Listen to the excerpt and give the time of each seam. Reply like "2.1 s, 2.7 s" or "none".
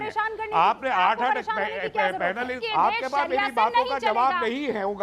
2.6 s